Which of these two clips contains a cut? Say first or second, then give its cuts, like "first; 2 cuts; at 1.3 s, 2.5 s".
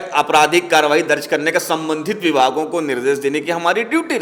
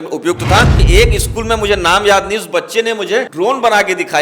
second; 2 cuts; at 0.8 s, 3.3 s